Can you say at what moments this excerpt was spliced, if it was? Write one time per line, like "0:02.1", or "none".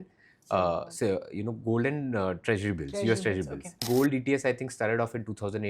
0:03.8

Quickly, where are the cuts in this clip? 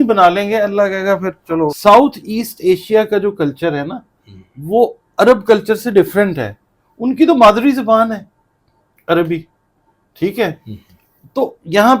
0:01.8

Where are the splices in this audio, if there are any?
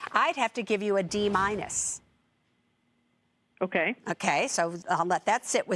0:04.8

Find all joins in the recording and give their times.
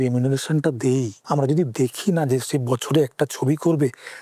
0:01.2

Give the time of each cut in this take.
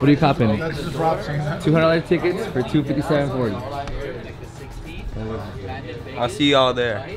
none

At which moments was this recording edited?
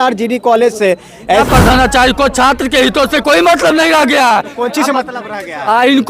0:01.5

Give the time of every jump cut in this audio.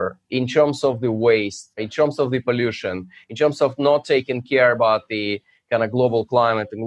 none

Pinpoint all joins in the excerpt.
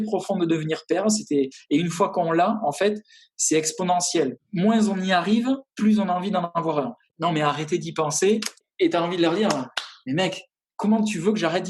0:04.4
0:07.0
0:08.7

